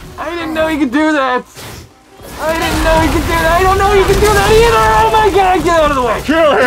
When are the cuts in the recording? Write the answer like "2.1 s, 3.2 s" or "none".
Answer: none